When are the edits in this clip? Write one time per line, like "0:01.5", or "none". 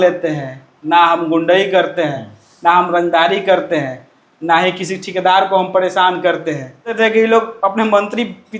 0:06.9